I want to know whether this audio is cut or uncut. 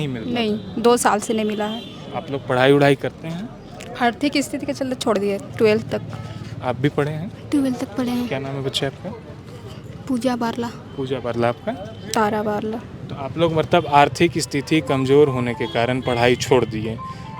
uncut